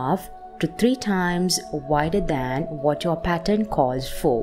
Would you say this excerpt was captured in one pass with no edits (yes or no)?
yes